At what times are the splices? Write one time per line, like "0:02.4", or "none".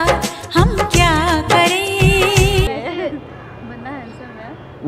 0:02.7

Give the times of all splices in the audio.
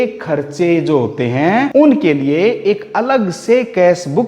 0:01.7

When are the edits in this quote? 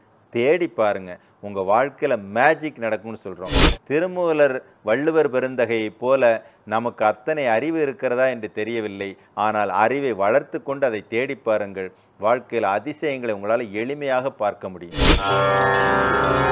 0:15.2

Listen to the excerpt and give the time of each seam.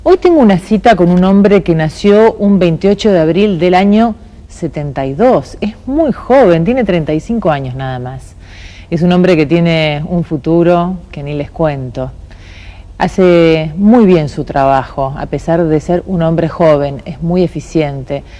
none

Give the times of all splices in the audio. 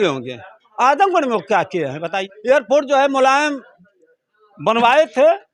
0:02.3

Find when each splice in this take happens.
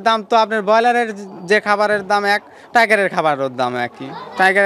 none

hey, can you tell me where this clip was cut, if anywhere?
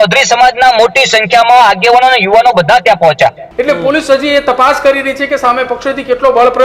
0:03.5

